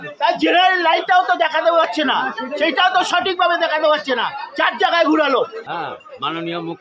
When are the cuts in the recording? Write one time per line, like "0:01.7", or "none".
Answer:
0:05.6